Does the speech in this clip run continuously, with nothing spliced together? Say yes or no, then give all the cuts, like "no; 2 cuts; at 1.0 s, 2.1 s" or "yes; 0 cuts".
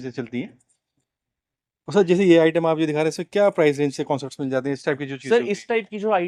yes; 0 cuts